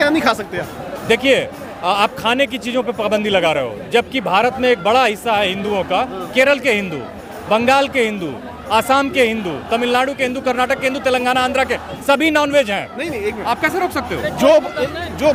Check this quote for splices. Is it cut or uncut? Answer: uncut